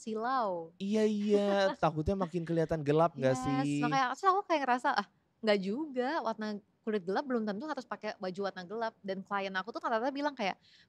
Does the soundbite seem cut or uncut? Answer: uncut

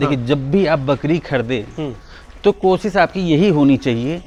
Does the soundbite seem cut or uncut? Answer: uncut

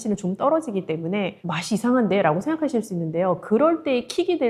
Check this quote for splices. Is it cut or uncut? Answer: uncut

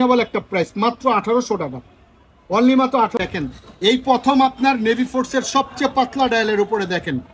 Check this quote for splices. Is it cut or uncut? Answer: cut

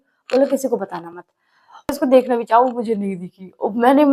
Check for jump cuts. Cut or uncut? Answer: cut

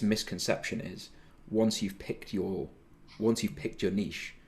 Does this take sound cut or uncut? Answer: uncut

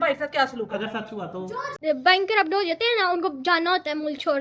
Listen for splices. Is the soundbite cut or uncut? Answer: cut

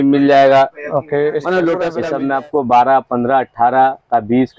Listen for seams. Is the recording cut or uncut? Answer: cut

